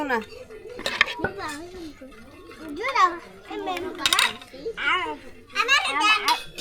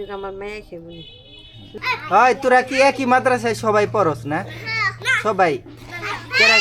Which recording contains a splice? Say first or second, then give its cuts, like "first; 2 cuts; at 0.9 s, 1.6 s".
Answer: second; 1 cut; at 1.8 s